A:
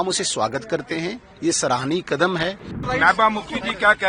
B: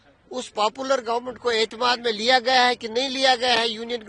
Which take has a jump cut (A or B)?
A